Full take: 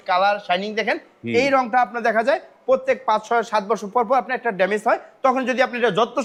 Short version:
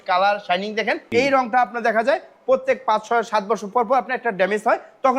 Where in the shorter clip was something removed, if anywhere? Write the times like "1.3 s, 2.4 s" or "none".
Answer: 1.0 s